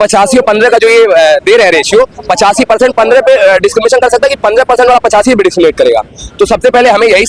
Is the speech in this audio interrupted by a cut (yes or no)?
no